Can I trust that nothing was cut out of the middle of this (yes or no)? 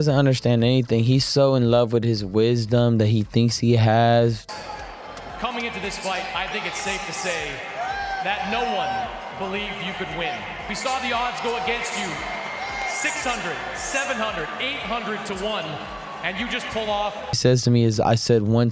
yes